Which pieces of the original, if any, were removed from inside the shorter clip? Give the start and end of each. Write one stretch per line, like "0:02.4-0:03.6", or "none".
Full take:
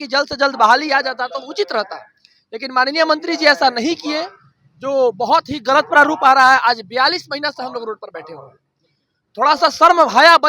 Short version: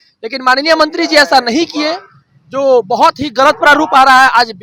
none